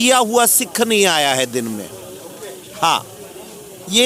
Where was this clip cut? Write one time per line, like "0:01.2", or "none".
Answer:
none